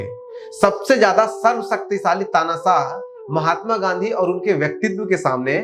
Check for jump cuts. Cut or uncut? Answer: uncut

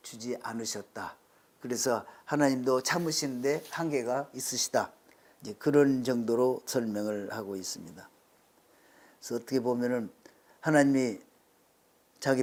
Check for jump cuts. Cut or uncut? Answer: uncut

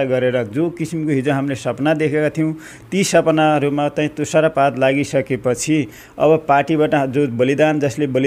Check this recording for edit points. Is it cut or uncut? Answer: uncut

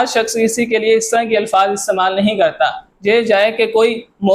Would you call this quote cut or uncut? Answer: uncut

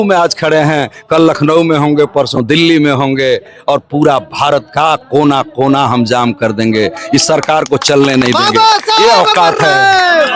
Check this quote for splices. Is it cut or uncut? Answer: uncut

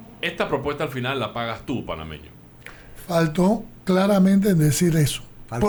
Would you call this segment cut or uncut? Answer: uncut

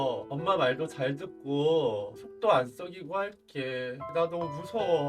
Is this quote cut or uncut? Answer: cut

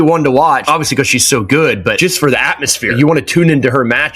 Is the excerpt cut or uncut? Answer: uncut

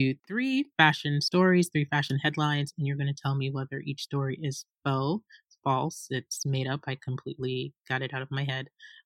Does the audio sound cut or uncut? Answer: uncut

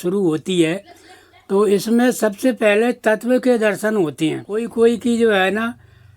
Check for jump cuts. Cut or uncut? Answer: cut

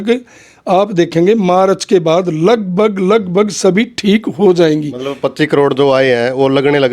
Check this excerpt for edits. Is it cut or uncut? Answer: uncut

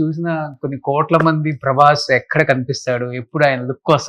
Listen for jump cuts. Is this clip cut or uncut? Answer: uncut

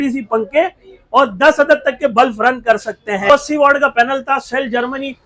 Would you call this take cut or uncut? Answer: cut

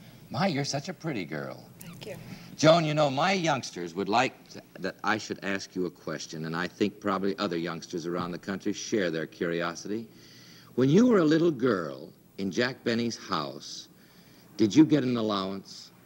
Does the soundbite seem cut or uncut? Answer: cut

